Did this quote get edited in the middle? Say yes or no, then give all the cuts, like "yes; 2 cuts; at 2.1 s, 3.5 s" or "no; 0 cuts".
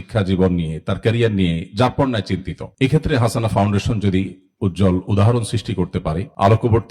no; 0 cuts